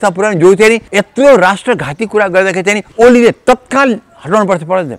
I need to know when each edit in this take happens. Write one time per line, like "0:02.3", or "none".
0:00.9
0:02.9